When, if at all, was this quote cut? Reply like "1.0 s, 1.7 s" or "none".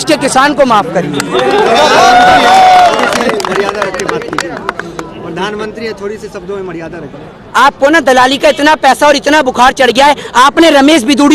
none